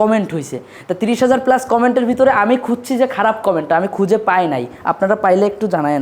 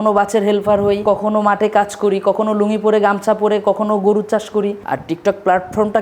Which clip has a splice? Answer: second; 2 cuts; at 1.0 s, 4.9 s

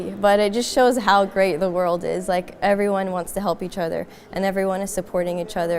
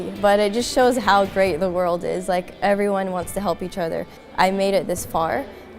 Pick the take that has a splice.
second; 1 cut; at 4.2 s

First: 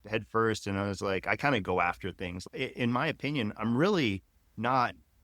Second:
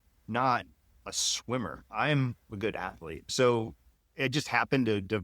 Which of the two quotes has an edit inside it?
second; 1 cut; at 3.3 s

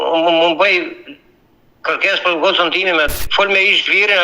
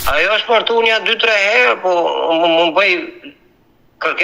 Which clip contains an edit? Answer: first; 1 cut; at 3.2 s

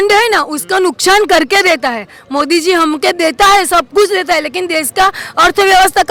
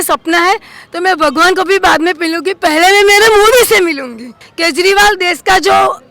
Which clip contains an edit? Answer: second; 1 cut; at 4.4 s

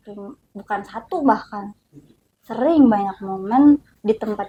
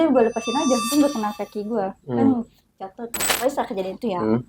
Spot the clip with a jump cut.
second; 1 cut; at 3.2 s

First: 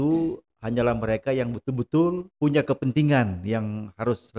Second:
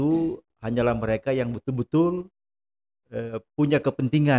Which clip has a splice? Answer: first; 1 cut; at 2.3 s

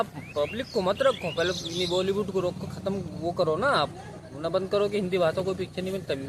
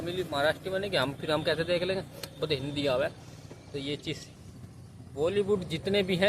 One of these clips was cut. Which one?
second; 1 cut; at 4.3 s

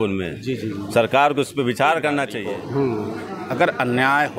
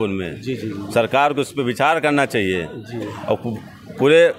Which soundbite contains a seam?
first; 1 cut; at 2.4 s

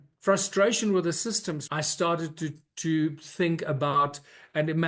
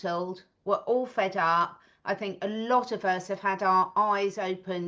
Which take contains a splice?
first; 1 cut; at 1.6 s

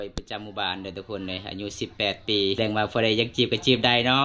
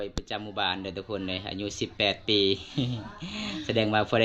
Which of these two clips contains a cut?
first; 1 cut; at 2.6 s

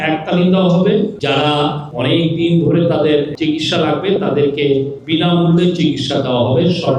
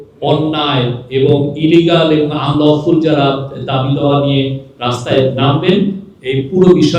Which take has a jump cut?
first; 3 cuts; at 1.6 s, 3.3 s, 5.0 s

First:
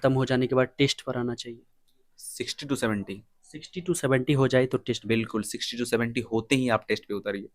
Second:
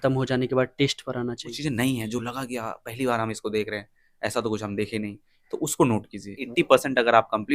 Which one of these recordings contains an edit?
second; 2 cuts; at 1.6 s, 6.4 s

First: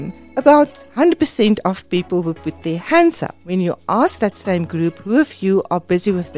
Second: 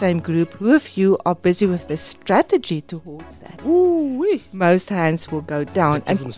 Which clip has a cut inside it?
first; 1 cut; at 3.3 s

